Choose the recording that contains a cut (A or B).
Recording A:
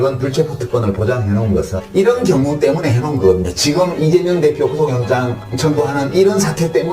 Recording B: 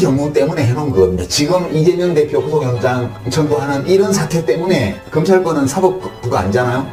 A